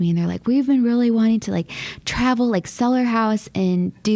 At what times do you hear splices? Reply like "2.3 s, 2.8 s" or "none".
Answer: none